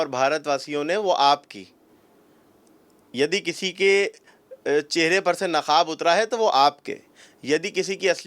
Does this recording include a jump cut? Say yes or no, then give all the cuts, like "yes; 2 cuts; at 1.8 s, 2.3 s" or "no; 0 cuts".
no; 0 cuts